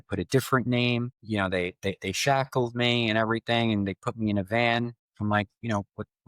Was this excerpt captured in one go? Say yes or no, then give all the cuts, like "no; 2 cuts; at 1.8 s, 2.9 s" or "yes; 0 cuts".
no; 2 cuts; at 1.2 s, 5.0 s